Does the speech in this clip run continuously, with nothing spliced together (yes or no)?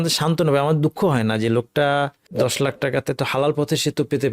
no